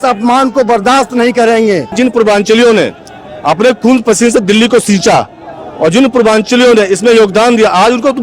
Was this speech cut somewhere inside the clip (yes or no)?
yes